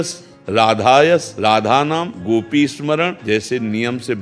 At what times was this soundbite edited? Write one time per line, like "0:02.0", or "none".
0:01.3
0:02.1
0:03.2